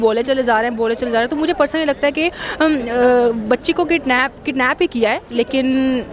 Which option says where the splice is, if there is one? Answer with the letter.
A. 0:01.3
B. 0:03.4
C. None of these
C